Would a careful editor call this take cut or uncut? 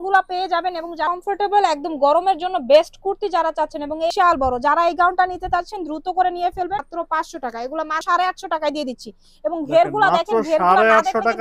cut